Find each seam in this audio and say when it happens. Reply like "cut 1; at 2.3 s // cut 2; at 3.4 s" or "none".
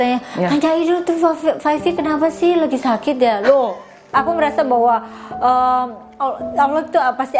cut 1; at 4.0 s

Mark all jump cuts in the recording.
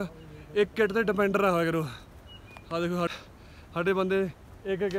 cut 1; at 3.1 s

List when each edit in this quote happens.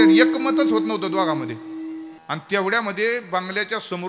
cut 1; at 2.1 s

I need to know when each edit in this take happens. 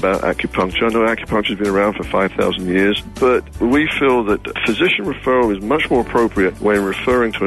cut 1; at 3.5 s // cut 2; at 4.6 s // cut 3; at 6.6 s

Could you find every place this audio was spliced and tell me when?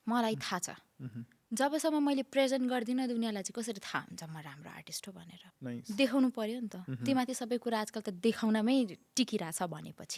cut 1; at 5.3 s

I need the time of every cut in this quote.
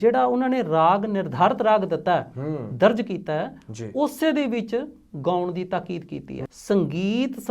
cut 1; at 6.5 s

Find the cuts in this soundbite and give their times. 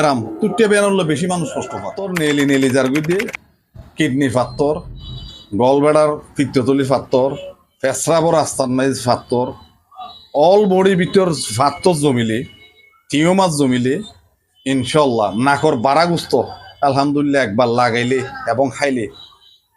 cut 1; at 2.0 s

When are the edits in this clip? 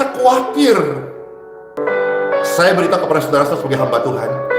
none

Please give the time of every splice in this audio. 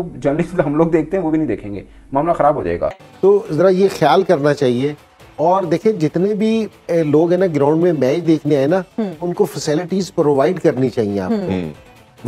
cut 1; at 3.0 s

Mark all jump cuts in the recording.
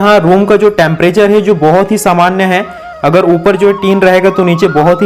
none

